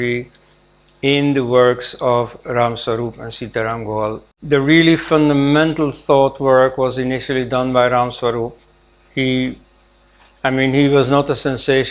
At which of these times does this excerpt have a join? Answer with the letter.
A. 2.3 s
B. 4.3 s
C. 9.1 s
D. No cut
B